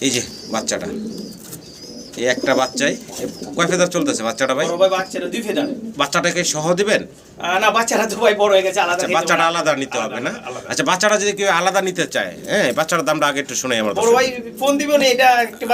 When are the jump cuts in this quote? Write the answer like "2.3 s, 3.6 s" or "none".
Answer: none